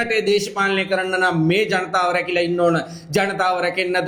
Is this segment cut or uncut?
uncut